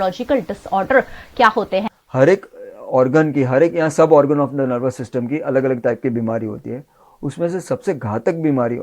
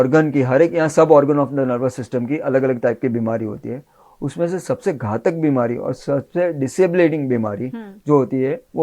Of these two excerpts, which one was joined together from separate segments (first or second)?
first